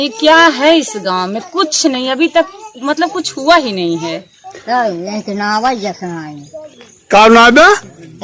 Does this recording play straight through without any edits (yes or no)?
yes